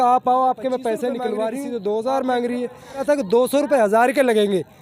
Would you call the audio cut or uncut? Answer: cut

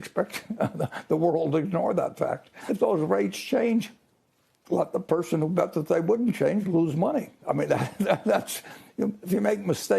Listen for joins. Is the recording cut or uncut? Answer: cut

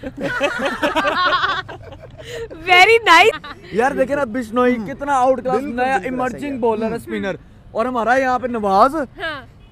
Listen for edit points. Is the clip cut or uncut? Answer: uncut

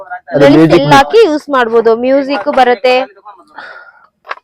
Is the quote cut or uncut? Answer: uncut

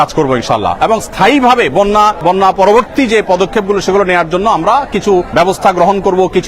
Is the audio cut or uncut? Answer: uncut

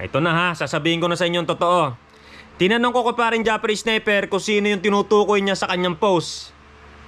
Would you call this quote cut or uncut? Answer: uncut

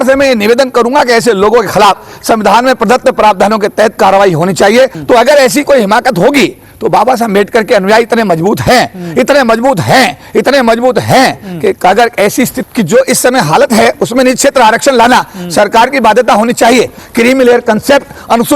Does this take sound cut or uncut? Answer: cut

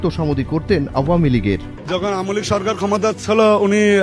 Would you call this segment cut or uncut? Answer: cut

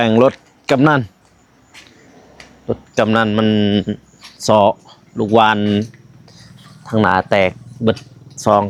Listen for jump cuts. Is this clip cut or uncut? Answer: uncut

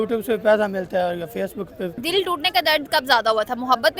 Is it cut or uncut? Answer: cut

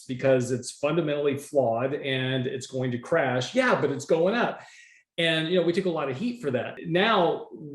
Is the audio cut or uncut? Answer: cut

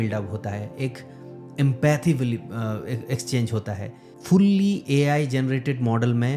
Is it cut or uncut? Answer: uncut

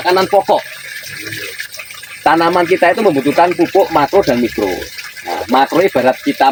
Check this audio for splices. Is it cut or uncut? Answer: uncut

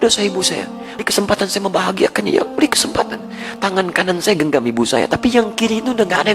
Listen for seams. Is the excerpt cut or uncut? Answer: cut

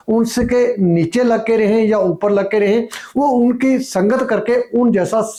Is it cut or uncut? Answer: uncut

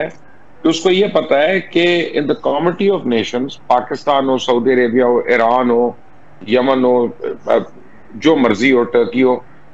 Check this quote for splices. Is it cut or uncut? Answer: uncut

